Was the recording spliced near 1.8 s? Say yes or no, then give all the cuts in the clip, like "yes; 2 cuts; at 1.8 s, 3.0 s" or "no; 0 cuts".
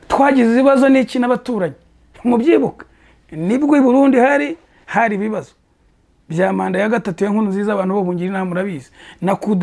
no; 0 cuts